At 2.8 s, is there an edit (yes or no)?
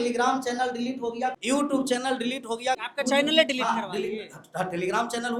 yes